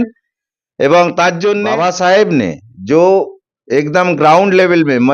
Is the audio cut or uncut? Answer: cut